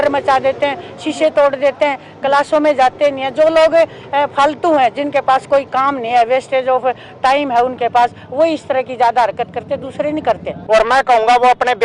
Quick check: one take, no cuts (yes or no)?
no